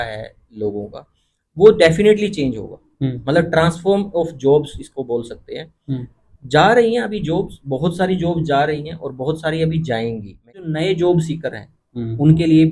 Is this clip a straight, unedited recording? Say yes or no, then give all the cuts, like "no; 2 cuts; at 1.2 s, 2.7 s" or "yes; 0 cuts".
no; 1 cut; at 10.5 s